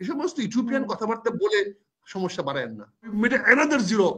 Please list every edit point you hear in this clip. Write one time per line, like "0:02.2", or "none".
0:03.1